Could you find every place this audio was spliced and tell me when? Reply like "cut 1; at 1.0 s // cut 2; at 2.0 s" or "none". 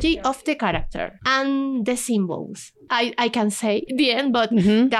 cut 1; at 1.1 s // cut 2; at 2.9 s // cut 3; at 3.9 s